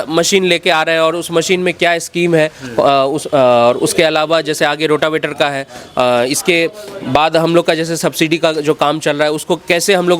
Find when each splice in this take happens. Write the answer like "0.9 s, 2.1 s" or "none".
none